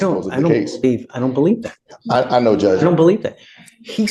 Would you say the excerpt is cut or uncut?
uncut